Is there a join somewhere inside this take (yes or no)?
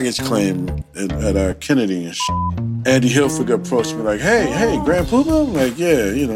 yes